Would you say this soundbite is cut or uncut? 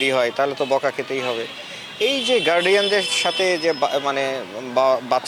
uncut